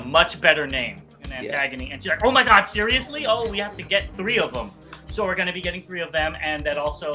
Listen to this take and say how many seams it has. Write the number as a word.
one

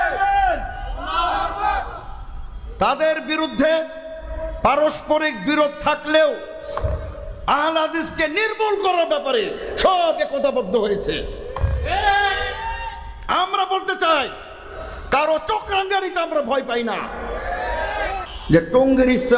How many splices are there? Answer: one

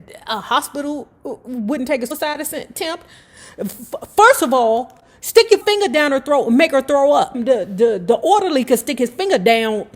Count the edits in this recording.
three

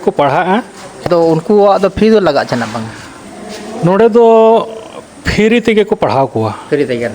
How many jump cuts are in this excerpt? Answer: one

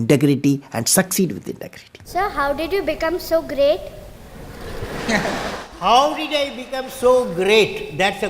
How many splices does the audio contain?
one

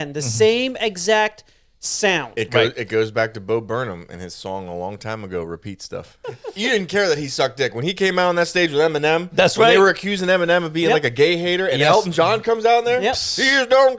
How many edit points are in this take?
one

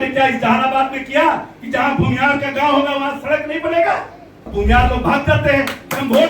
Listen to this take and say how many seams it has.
one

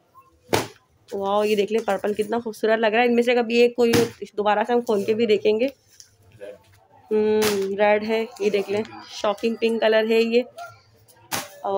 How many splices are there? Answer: zero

